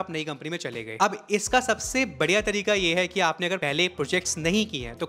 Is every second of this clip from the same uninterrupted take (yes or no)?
yes